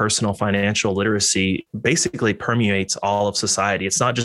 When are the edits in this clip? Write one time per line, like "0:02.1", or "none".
0:01.7